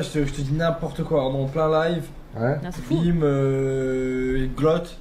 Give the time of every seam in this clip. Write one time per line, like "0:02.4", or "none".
none